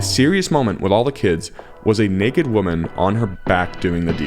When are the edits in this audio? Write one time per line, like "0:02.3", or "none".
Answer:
0:03.4